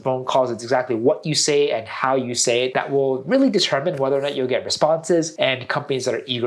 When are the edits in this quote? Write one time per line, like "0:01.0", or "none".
0:02.7
0:05.3